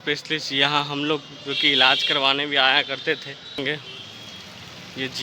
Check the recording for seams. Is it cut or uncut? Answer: cut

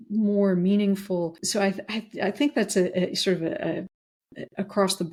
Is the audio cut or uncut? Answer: uncut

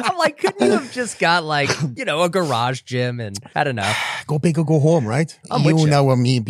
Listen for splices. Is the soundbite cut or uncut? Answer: cut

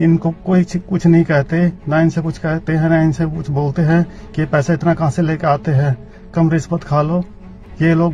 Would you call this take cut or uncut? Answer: uncut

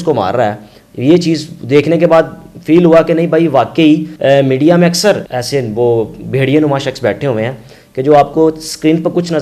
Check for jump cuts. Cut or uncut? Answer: cut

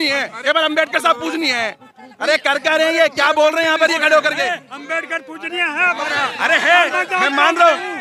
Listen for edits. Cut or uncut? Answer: uncut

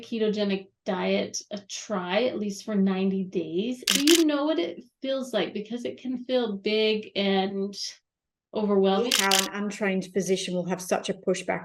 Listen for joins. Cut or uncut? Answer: cut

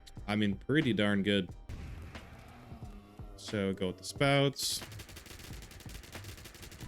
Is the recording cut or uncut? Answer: cut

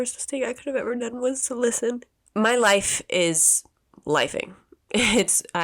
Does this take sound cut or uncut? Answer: cut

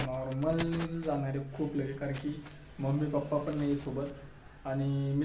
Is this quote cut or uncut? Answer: uncut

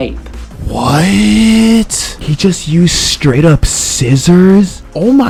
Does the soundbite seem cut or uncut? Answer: uncut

